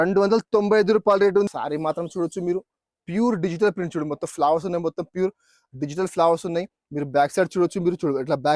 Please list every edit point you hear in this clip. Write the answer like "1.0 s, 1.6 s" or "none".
1.5 s